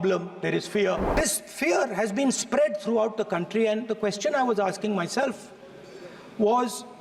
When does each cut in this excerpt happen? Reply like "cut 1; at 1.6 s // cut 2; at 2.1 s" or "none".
cut 1; at 1.1 s